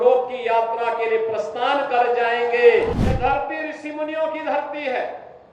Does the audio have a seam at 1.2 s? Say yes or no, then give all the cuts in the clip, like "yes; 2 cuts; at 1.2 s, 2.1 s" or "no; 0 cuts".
no; 1 cut; at 2.8 s